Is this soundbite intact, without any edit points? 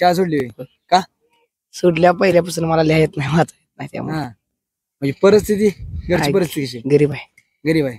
yes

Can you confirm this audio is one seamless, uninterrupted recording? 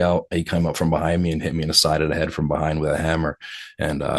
yes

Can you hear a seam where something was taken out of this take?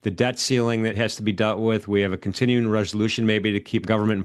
yes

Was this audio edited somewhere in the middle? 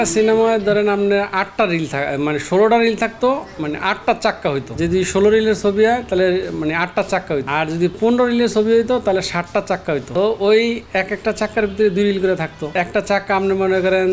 yes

